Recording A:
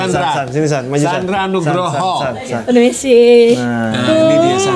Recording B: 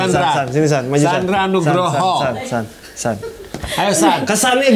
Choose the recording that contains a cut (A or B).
A